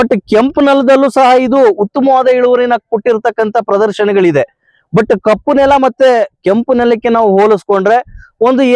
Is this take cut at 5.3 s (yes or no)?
no